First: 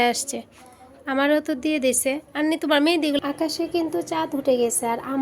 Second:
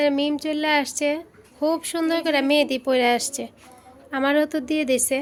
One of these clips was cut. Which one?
first; 1 cut; at 3.2 s

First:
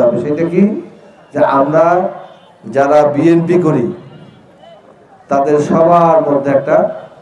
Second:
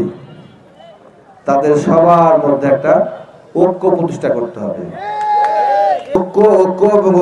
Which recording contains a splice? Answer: second; 1 cut; at 6.2 s

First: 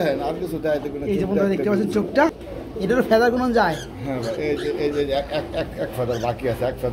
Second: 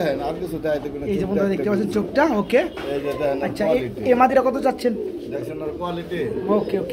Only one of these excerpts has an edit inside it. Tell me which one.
first; 1 cut; at 2.3 s

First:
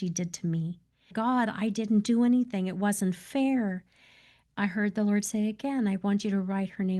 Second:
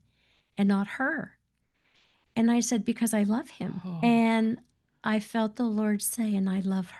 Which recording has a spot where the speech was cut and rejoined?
first; 2 cuts; at 1.1 s, 4.4 s

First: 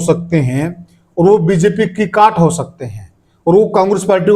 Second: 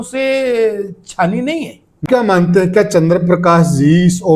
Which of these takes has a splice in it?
second; 1 cut; at 2.0 s

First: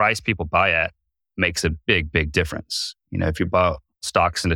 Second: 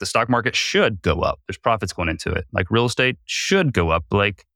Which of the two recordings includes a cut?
first; 1 cut; at 1.5 s

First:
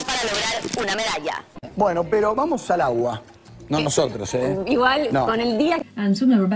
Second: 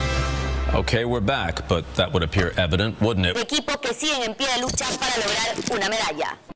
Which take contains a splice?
first; 1 cut; at 4.5 s

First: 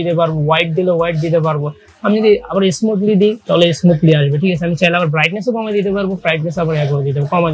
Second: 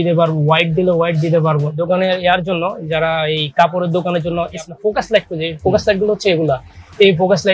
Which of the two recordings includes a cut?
second; 2 cuts; at 1.8 s, 4.6 s

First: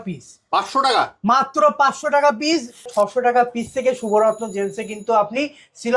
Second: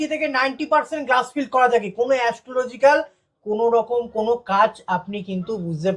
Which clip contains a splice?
first; 1 cut; at 2.9 s

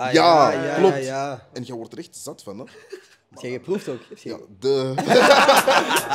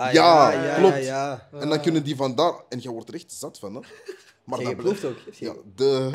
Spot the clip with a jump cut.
first; 2 cuts; at 1.5 s, 5.2 s

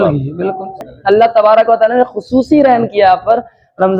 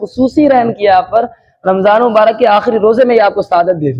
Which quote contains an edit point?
first; 1 cut; at 0.9 s

